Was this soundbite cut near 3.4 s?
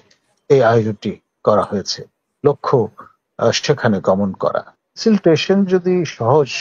no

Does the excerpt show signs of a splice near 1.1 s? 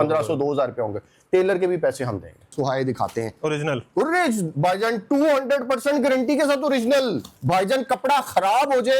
no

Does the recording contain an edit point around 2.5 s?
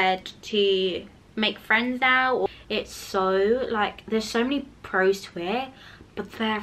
yes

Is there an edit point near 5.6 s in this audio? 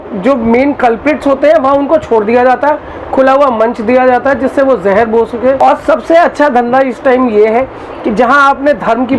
yes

